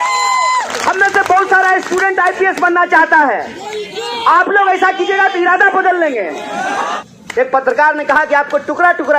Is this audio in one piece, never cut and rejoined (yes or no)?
no